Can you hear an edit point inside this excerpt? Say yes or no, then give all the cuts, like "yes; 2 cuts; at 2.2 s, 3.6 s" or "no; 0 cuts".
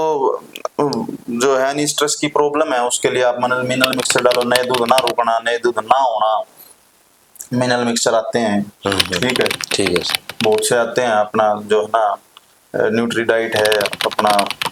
no; 0 cuts